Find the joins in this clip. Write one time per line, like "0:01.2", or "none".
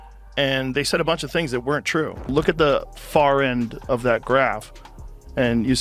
0:02.3